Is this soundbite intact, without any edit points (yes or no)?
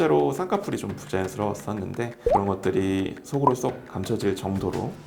yes